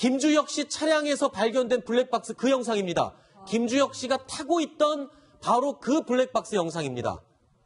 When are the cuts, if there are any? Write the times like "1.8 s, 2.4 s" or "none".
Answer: 4.3 s